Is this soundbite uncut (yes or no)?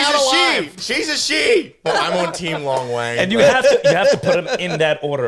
no